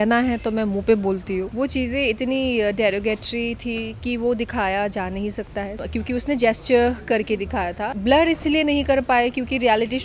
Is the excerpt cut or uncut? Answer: cut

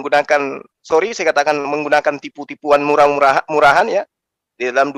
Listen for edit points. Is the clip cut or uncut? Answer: uncut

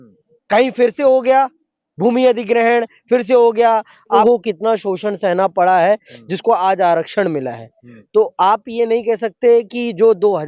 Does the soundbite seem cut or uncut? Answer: cut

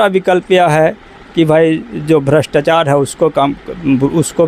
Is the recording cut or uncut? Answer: uncut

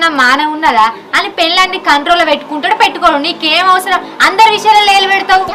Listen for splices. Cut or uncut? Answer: uncut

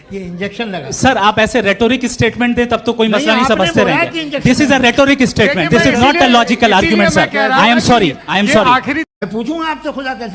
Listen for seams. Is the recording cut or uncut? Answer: cut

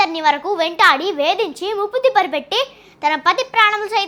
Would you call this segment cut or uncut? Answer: uncut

